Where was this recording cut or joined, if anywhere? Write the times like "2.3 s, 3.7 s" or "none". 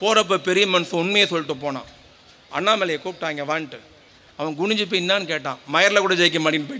none